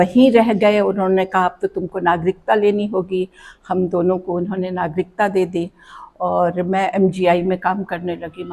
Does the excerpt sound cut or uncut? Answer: uncut